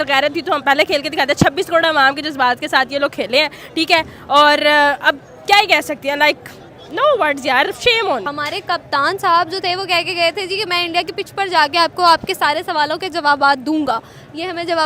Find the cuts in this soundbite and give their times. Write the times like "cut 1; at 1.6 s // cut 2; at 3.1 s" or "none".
cut 1; at 8.3 s